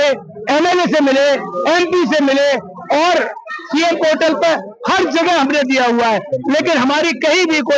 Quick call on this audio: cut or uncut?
uncut